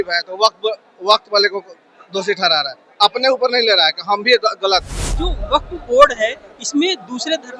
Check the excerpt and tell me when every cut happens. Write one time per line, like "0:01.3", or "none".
0:05.3

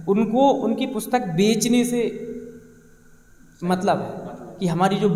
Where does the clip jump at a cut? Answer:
none

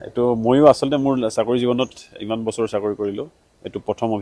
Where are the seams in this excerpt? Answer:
none

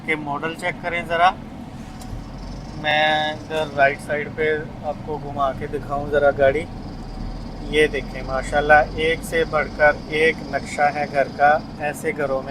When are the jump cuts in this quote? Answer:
none

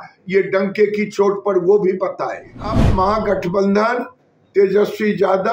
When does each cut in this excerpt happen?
0:02.8

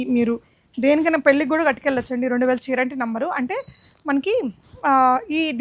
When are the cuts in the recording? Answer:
none

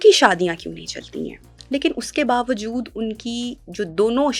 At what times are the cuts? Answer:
0:01.5

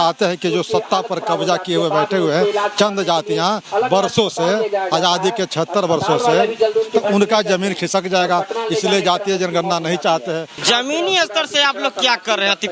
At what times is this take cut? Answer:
0:10.5

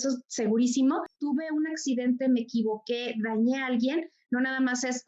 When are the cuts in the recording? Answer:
0:01.1

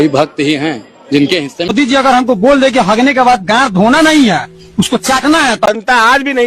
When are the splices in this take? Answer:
0:01.7
0:05.7

